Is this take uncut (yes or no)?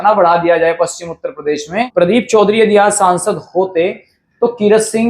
no